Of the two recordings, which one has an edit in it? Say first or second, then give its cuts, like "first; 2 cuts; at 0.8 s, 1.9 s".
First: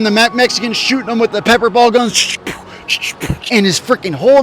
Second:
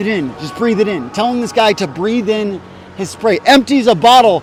first; 1 cut; at 3.4 s